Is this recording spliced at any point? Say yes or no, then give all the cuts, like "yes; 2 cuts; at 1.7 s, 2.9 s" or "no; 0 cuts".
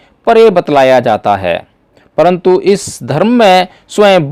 no; 0 cuts